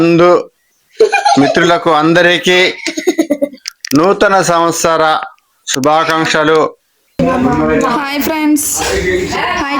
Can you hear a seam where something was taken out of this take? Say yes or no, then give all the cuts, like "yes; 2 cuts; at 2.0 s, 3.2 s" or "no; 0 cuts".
yes; 1 cut; at 7.1 s